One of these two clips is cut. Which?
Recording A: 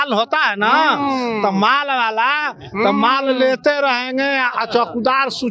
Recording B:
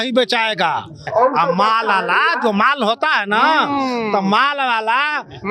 B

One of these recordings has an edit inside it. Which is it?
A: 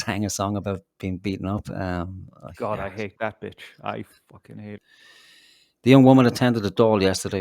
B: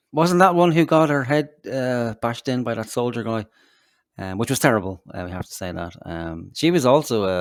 A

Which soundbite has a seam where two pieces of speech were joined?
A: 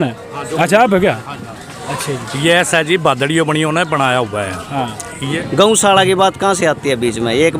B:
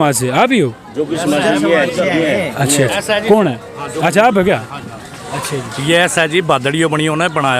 A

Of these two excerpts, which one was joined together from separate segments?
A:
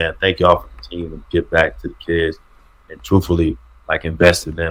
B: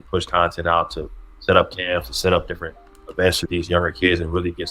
B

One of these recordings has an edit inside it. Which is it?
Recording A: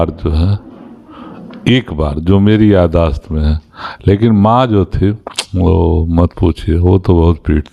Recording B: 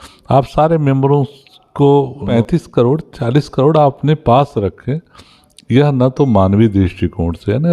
B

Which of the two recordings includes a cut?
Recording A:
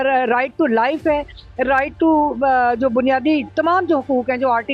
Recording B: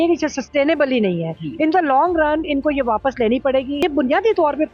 B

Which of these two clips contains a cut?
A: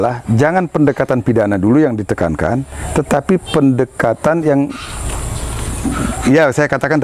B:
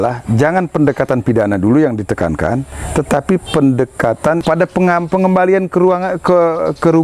B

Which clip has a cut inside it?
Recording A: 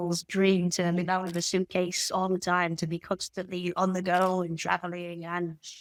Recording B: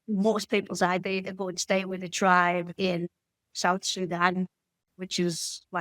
B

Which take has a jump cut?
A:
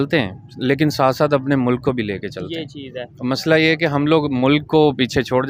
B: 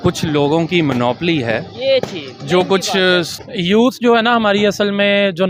B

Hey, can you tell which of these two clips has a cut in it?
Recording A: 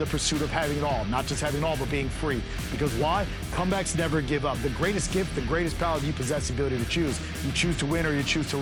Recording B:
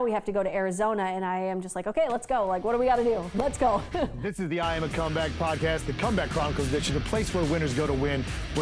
B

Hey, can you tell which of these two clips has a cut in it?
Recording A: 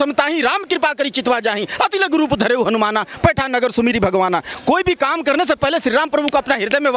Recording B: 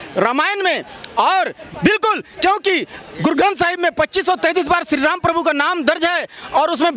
B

